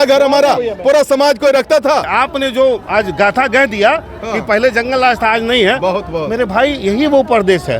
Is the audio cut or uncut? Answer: cut